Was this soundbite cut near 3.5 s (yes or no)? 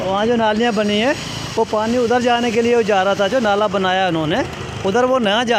no